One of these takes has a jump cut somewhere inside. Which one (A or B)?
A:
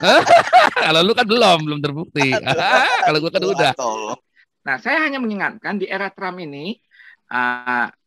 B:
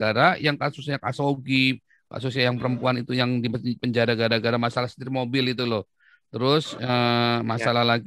A